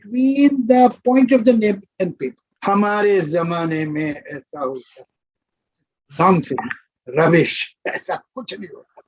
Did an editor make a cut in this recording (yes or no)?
yes